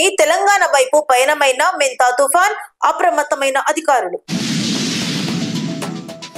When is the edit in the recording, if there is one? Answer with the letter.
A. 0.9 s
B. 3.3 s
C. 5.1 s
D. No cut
D